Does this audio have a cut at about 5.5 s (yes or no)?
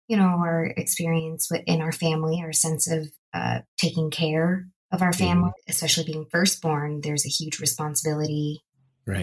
yes